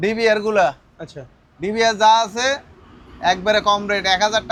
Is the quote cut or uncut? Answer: uncut